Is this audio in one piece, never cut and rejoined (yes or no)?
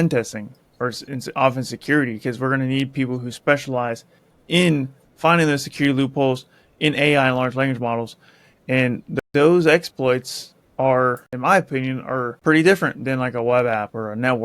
no